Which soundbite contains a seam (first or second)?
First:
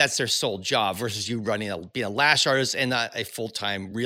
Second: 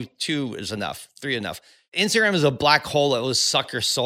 second